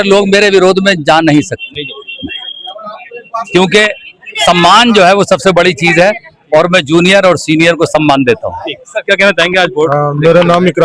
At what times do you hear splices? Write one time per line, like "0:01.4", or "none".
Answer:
none